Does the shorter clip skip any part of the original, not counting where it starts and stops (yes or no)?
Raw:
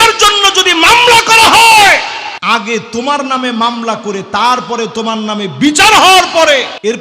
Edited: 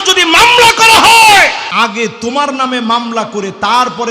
yes